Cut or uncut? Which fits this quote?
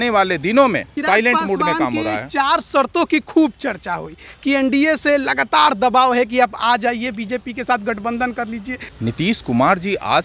cut